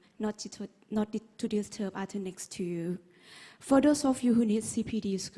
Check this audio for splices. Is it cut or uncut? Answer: cut